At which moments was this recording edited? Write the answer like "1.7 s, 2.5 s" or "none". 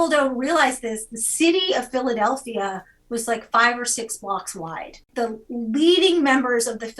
5.1 s